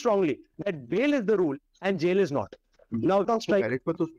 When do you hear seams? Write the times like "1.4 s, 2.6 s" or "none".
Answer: 3.3 s